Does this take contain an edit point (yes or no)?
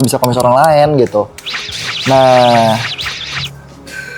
no